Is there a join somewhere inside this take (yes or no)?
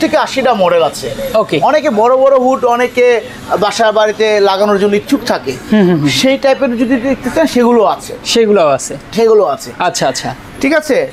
no